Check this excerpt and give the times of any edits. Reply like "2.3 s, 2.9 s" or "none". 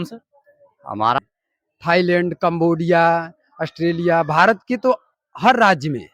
1.2 s